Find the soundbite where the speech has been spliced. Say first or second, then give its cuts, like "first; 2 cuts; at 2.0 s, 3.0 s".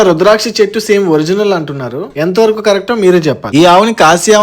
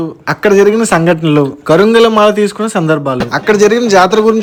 first; 1 cut; at 3.4 s